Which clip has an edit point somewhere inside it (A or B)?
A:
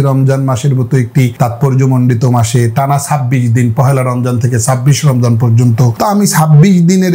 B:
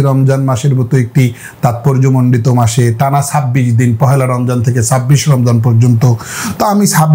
A